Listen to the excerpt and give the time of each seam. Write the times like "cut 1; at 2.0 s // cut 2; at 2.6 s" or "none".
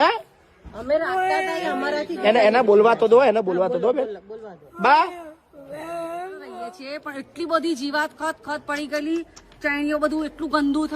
cut 1; at 6.6 s